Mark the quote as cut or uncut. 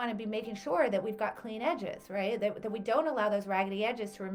uncut